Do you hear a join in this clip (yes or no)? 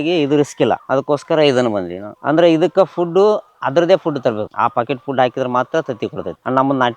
no